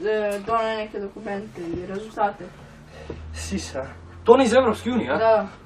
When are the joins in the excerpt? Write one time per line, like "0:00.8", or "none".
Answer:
0:00.9